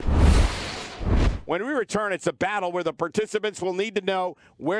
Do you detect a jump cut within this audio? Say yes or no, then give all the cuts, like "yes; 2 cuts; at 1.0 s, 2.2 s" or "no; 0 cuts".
yes; 1 cut; at 1.4 s